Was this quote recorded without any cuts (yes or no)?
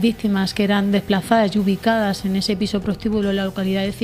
yes